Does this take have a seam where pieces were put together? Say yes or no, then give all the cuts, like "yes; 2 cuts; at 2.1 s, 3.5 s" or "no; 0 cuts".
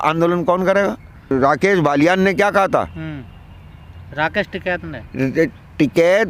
yes; 1 cut; at 1.3 s